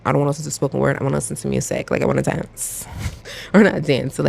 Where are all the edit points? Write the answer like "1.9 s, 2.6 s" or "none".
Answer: none